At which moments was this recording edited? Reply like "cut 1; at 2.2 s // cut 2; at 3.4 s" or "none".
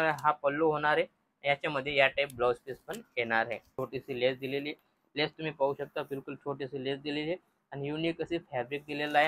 cut 1; at 3.8 s